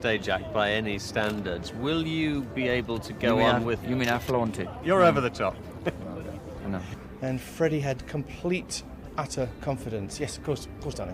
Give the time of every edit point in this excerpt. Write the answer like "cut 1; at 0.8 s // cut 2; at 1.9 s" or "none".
cut 1; at 7.0 s